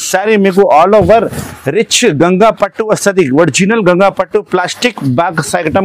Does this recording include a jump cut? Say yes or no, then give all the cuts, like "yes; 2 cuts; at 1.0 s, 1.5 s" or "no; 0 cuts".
no; 0 cuts